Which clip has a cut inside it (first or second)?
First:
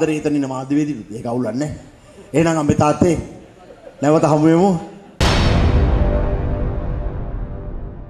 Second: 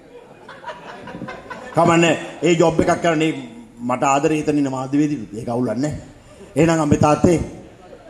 first